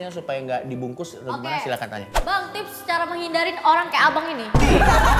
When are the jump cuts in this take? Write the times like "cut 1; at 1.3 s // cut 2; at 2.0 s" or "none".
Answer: none